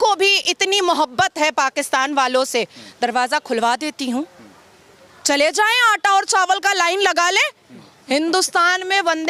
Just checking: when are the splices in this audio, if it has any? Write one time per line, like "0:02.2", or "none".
none